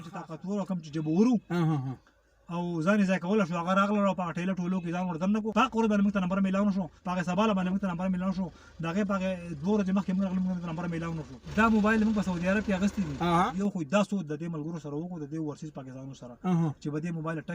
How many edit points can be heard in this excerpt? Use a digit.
4